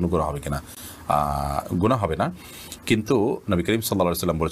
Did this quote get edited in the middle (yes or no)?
no